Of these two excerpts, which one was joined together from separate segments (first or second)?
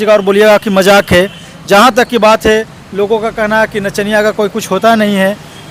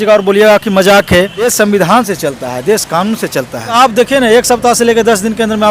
second